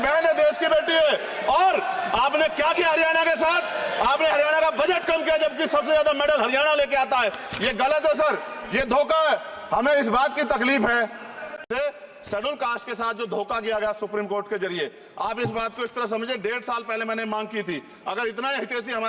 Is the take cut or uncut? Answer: cut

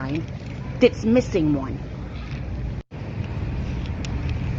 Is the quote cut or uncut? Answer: uncut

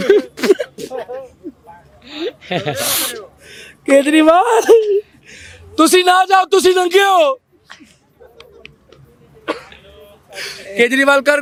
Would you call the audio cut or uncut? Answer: uncut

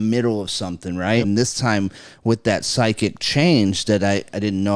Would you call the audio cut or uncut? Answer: cut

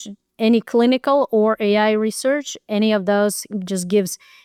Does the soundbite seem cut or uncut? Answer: uncut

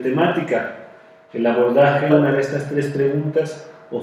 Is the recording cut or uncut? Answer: uncut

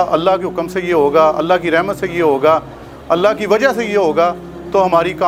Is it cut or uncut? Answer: uncut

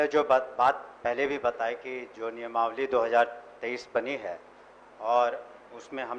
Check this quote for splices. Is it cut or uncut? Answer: uncut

